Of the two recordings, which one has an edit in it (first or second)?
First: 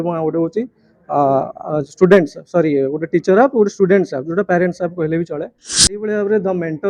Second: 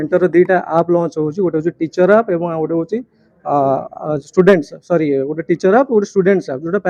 first